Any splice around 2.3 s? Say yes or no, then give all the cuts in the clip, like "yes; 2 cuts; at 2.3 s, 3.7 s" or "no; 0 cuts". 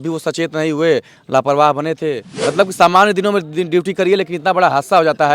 yes; 1 cut; at 2.3 s